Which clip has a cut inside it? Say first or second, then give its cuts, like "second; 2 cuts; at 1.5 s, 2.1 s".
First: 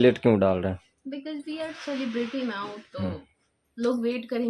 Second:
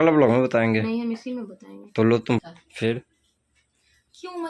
second; 1 cut; at 2.4 s